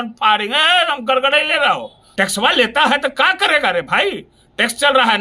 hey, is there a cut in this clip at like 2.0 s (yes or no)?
yes